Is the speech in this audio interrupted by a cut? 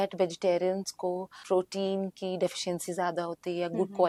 no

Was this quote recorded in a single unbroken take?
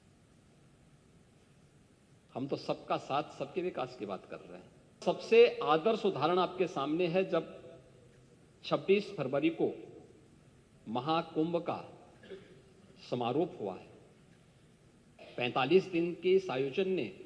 no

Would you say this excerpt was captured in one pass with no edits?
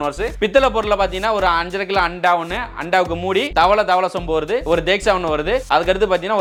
yes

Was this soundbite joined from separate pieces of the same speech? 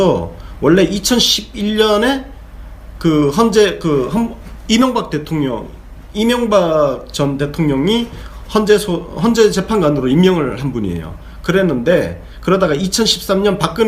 yes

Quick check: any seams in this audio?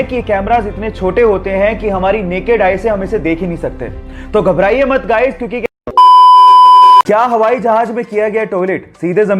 yes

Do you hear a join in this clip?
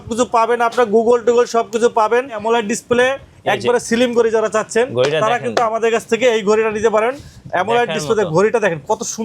yes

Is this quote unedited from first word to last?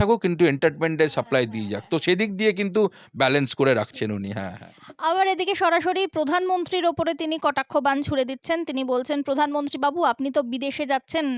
yes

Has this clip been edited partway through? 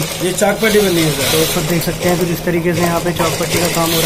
no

